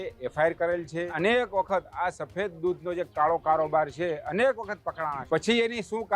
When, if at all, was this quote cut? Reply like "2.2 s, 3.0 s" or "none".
1.1 s, 5.2 s